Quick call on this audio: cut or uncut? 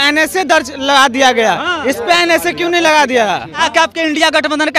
cut